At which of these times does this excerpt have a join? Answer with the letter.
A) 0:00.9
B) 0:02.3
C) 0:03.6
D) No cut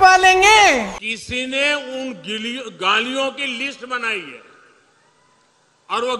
A